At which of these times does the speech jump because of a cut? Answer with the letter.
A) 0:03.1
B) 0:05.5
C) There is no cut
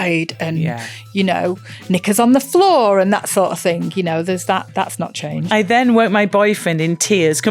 B